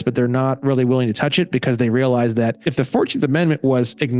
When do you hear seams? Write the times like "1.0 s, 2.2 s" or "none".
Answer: 2.6 s